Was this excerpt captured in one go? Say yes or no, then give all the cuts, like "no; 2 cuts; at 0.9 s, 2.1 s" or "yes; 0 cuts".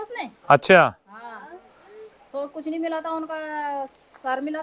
yes; 0 cuts